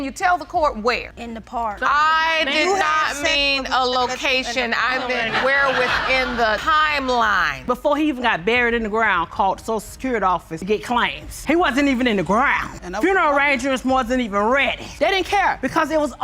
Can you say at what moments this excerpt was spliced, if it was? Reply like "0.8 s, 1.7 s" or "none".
1.8 s, 7.5 s, 14.9 s